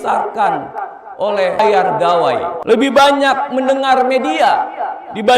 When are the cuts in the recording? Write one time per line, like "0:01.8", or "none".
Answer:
0:01.6
0:02.5